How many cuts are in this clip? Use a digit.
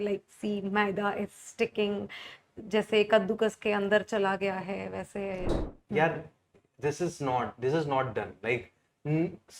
1